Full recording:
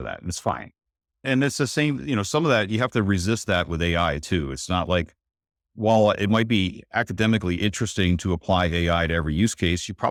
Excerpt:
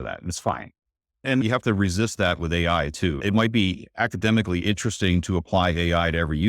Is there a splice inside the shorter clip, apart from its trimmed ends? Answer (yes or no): yes